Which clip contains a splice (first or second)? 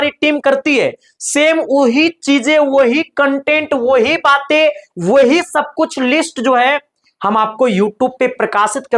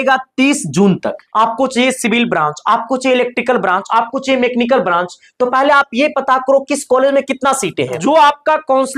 second